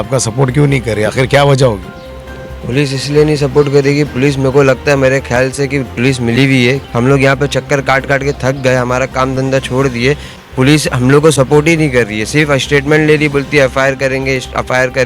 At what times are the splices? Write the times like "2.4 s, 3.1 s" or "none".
none

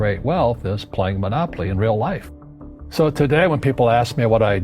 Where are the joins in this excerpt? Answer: 2.3 s

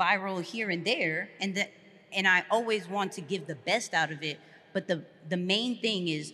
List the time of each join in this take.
none

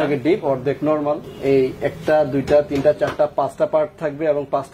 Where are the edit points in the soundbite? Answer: 1.3 s

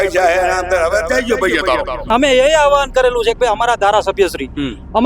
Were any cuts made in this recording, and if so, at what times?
2.1 s

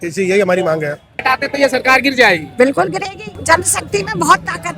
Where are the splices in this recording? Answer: 1.2 s, 3.3 s

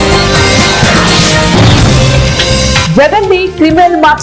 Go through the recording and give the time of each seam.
2.8 s

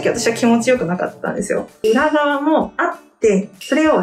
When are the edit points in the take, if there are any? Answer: 1.8 s

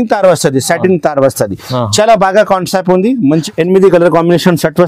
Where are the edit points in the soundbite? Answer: 3.4 s

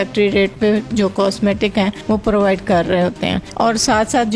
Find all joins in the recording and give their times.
2.0 s, 3.4 s

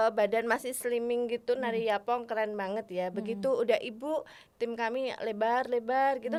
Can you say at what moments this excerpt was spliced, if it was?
none

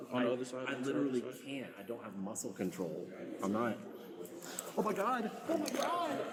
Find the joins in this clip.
none

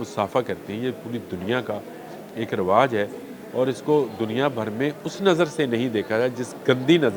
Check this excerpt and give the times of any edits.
none

